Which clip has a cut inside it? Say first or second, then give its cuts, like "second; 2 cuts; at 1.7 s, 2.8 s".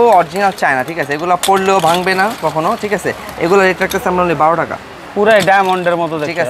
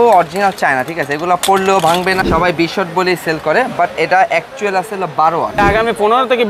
second; 2 cuts; at 2.2 s, 5.6 s